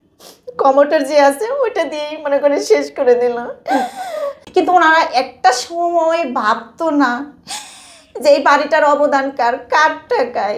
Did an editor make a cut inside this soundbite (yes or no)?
yes